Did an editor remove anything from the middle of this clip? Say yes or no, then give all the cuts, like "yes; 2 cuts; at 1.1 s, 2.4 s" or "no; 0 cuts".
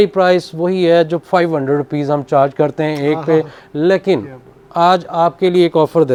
no; 0 cuts